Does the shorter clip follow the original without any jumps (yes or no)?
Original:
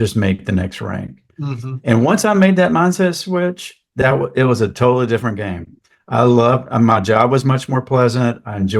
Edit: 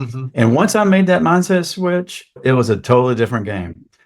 no